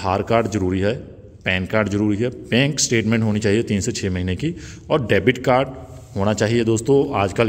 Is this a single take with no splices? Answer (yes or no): yes